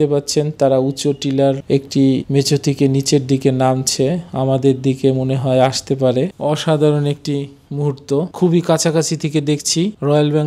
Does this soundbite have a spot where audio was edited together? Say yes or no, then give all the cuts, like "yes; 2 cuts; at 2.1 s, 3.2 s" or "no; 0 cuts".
no; 0 cuts